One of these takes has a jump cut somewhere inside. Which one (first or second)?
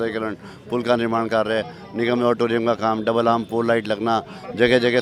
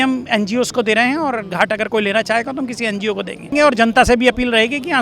second